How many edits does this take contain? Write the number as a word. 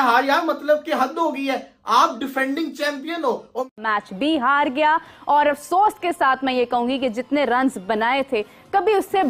one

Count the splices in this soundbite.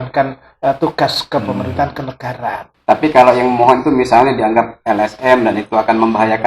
one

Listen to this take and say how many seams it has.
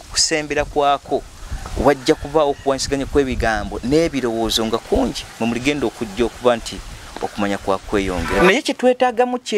one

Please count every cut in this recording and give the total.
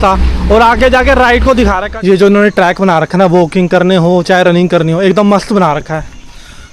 one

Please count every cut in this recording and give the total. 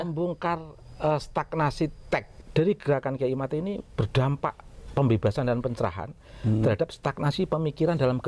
one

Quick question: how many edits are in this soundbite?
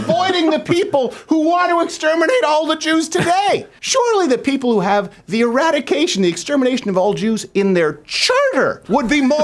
one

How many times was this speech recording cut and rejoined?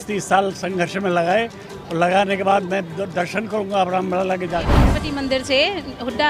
one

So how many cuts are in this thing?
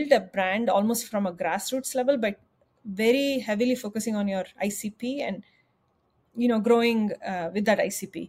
zero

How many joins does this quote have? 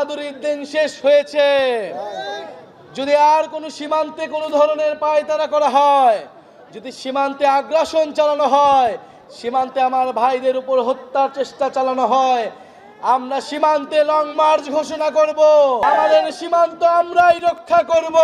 one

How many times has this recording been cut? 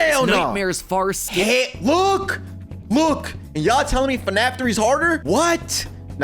one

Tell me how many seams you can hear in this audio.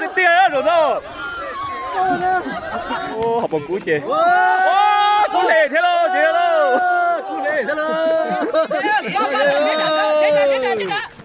one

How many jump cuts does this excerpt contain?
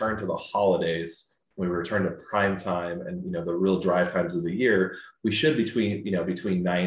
zero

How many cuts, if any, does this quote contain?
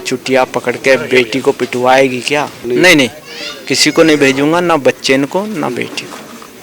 one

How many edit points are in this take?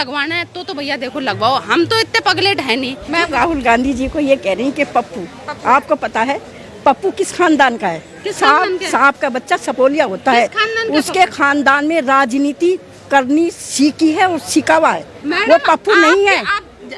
one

